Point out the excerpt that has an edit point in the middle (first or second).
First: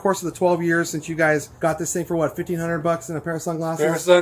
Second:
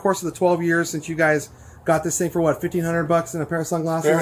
first